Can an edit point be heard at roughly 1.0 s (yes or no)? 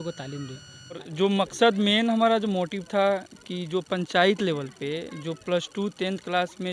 yes